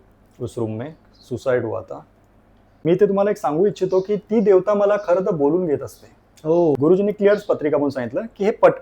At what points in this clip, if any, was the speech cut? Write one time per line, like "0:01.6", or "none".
0:02.7
0:06.8